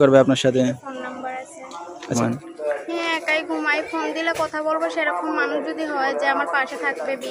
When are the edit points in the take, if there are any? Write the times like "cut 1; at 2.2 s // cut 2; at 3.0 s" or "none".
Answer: cut 1; at 2.1 s